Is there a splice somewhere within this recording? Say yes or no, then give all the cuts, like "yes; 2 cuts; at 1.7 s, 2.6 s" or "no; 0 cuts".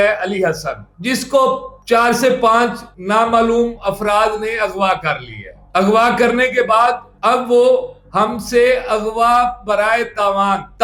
no; 0 cuts